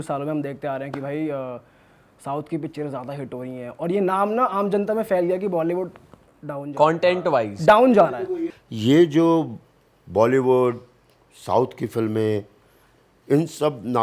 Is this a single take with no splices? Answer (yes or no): yes